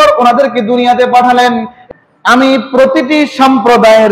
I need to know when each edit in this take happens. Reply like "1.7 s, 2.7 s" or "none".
1.8 s